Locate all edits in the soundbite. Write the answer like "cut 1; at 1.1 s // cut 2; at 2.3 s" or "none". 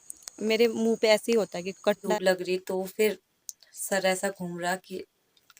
cut 1; at 2.1 s